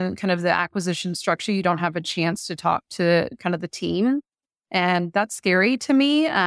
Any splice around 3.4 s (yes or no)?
no